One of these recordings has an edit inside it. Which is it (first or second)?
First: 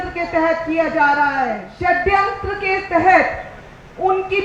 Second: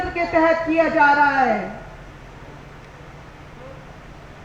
first